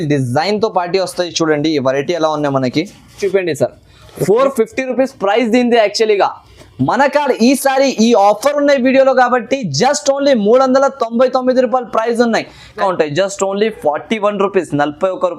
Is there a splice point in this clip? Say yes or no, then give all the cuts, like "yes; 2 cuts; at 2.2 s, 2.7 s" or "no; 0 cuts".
yes; 2 cuts; at 3.2 s, 12.8 s